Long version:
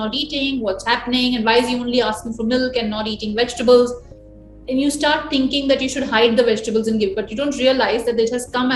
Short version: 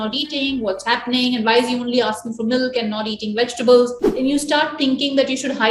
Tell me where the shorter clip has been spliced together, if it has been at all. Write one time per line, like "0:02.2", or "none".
0:04.0